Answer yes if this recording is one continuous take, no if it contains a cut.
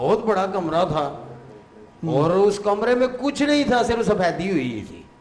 yes